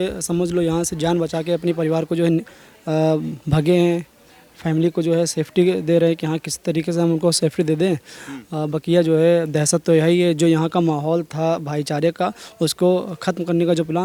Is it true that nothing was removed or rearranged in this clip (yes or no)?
yes